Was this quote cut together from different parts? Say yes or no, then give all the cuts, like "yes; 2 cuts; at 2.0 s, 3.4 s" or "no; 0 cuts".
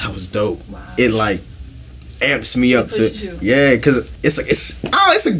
yes; 1 cut; at 4.1 s